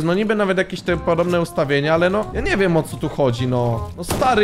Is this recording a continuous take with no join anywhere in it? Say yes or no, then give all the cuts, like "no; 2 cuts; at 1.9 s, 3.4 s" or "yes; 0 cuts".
no; 1 cut; at 2.3 s